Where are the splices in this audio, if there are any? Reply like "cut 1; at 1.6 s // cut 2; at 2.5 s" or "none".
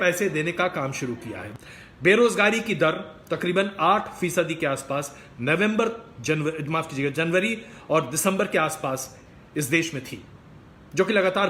cut 1; at 1.4 s

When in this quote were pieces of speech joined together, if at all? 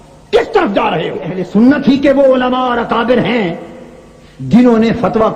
cut 1; at 1.4 s

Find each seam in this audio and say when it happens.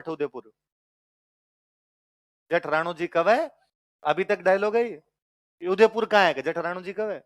none

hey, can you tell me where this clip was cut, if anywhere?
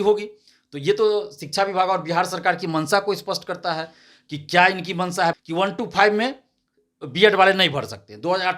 cut 1; at 5.3 s

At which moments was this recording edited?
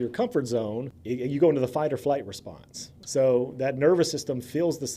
cut 1; at 0.9 s // cut 2; at 3.0 s

